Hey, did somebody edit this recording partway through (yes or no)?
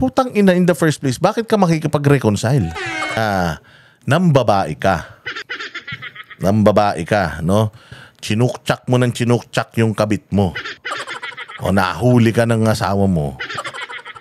yes